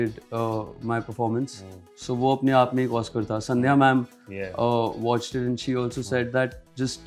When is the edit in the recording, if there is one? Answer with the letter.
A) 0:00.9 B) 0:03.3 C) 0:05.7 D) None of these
D